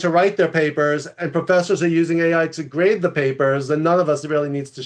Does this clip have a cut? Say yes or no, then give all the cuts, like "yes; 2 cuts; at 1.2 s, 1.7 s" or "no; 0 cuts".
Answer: no; 0 cuts